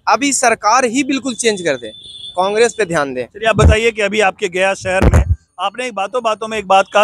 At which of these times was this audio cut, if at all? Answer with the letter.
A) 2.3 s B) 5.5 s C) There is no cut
C